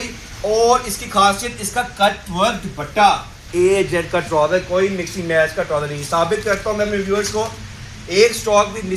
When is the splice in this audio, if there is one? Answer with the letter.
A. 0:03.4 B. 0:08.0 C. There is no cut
A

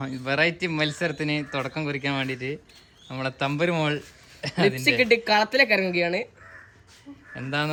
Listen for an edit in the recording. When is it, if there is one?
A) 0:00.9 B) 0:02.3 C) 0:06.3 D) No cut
D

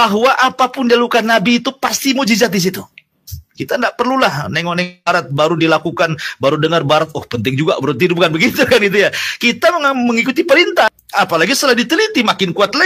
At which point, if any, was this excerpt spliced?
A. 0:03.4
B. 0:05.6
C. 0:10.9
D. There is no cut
C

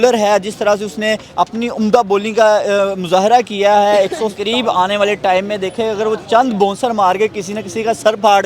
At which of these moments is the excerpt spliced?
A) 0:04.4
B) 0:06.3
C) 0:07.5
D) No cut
A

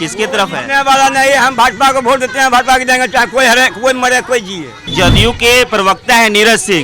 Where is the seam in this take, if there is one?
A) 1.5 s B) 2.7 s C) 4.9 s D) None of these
C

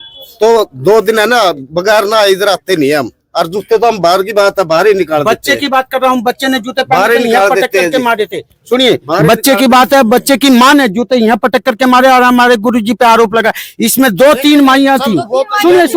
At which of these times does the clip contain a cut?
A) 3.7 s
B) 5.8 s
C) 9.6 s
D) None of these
D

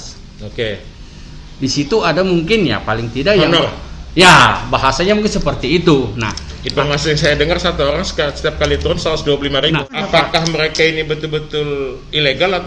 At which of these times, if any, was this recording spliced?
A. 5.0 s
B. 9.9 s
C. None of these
B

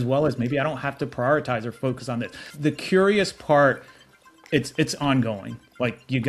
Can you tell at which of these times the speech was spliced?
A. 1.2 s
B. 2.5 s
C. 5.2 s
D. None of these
B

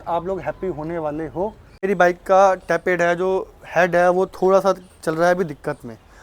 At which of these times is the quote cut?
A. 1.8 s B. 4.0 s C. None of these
A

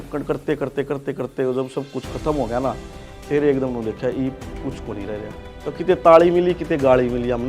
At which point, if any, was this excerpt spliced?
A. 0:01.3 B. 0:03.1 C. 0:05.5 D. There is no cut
C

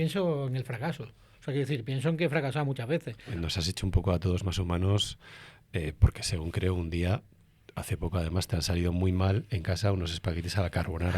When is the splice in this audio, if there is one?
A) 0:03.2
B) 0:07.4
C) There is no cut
A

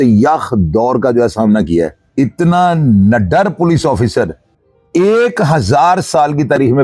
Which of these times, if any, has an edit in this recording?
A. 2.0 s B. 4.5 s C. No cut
A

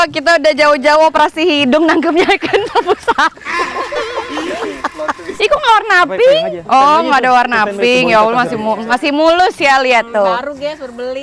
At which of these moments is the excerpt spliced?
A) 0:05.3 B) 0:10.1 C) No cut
C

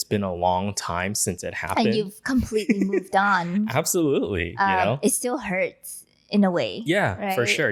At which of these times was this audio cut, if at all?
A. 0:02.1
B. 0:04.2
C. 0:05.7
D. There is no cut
D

